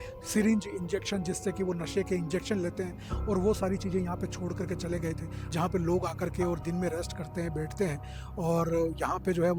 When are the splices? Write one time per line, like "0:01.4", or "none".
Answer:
0:05.4